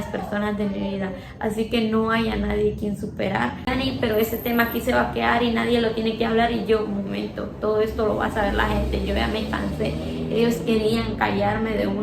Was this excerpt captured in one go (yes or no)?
no